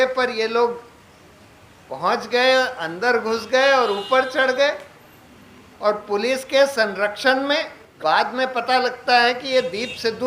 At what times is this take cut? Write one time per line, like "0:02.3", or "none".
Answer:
0:07.9

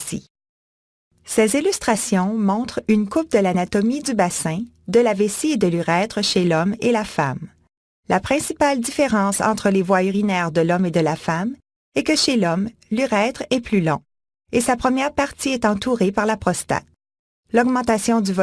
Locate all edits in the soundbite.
0:07.1

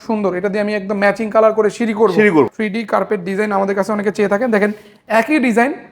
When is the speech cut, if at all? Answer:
0:02.5

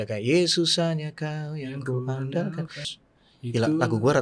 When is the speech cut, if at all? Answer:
0:02.9

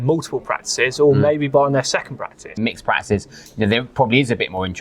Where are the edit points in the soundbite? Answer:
0:02.6

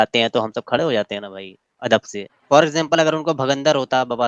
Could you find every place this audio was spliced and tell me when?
0:02.3

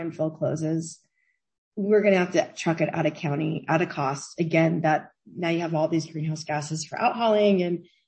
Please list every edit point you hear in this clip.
none

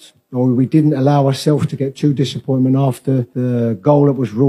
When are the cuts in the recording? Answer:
0:03.3

